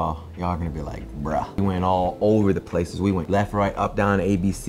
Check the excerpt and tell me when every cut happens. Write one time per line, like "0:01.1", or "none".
0:01.6